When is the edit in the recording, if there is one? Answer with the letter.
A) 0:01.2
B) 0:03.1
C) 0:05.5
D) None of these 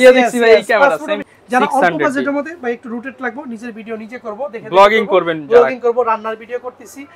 A